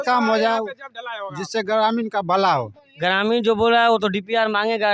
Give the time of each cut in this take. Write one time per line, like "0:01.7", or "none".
0:02.9